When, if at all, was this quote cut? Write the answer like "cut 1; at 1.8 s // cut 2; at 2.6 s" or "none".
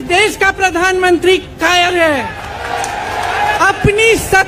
cut 1; at 3.6 s